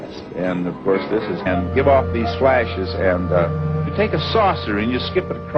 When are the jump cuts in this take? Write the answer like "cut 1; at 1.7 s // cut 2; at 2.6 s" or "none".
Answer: none

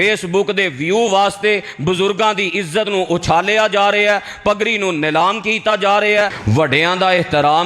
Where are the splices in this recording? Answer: cut 1; at 6.4 s

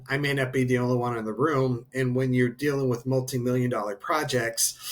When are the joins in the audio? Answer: none

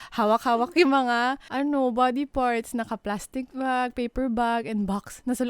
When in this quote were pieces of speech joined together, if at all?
cut 1; at 1.4 s

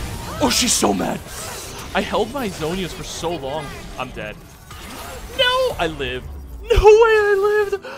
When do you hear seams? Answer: none

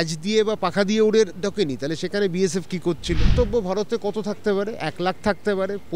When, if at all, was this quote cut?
cut 1; at 3.3 s

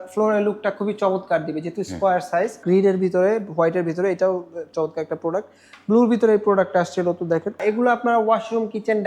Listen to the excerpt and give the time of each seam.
cut 1; at 2.6 s // cut 2; at 7.6 s

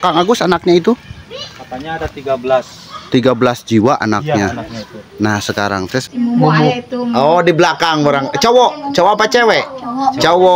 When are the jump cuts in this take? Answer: cut 1; at 6.0 s

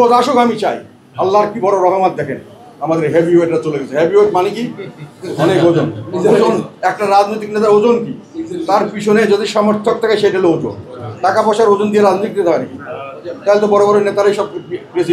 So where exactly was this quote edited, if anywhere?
none

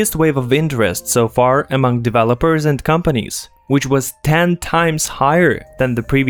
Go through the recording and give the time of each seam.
none

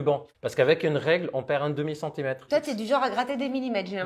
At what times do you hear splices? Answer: cut 1; at 2.4 s

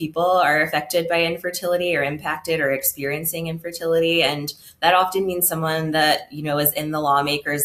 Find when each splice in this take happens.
none

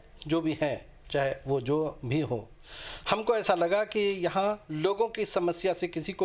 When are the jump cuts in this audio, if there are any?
none

